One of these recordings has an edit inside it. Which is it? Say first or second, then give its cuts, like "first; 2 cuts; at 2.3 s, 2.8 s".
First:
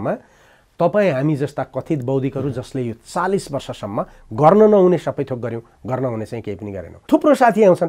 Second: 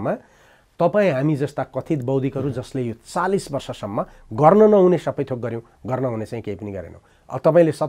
first; 1 cut; at 6.9 s